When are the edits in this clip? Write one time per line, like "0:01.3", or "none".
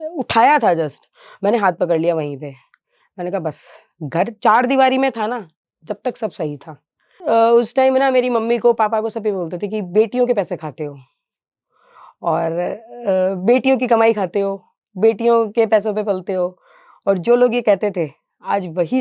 0:07.1